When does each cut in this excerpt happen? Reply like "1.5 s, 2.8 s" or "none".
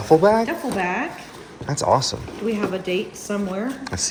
none

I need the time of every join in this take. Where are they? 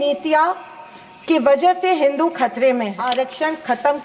3.0 s

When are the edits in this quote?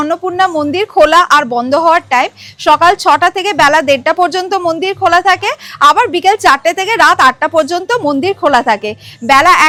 none

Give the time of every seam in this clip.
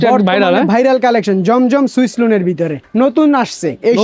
2.8 s

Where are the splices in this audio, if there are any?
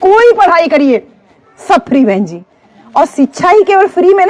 none

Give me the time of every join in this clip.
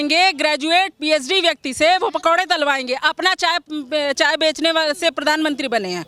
none

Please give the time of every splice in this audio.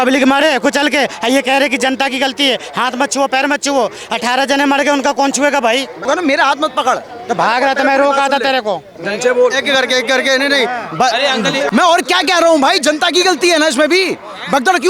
6.0 s, 11.7 s

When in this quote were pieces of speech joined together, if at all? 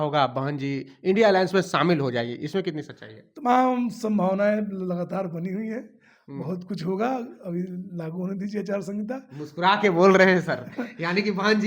none

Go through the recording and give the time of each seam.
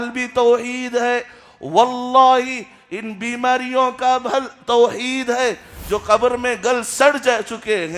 5.7 s

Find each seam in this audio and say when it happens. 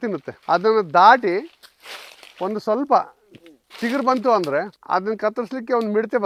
none

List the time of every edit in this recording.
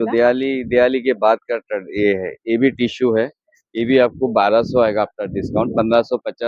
none

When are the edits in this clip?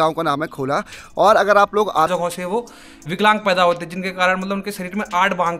2.1 s

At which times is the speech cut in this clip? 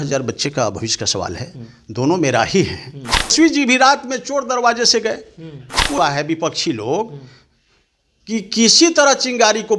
3.3 s, 6.0 s

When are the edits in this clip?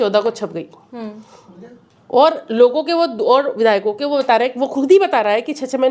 none

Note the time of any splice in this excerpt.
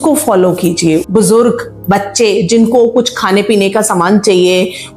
1.0 s

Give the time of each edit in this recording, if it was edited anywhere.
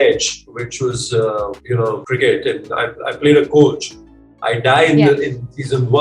1.9 s

